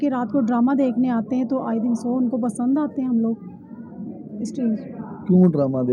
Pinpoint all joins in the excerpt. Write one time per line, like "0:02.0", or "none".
none